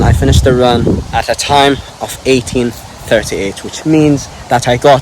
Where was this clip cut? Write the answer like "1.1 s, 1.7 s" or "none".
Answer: 1.0 s